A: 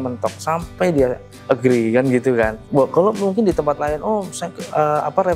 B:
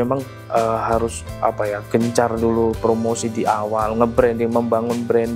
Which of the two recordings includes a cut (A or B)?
A